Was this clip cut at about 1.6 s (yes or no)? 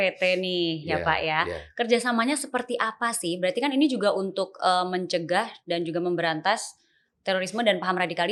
no